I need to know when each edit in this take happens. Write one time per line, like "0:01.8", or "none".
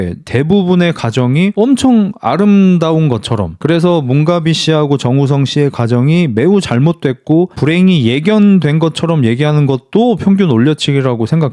none

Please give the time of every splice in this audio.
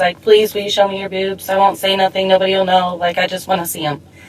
none

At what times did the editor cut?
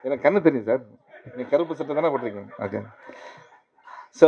none

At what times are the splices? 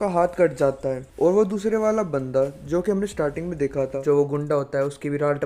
0:04.0

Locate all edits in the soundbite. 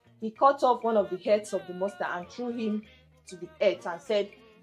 none

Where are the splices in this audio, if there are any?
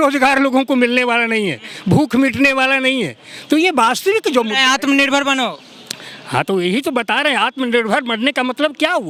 none

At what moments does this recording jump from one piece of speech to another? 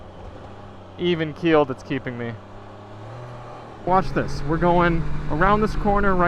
0:03.9

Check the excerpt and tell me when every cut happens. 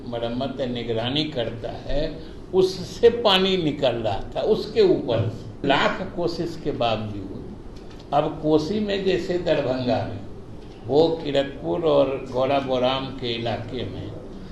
0:05.6

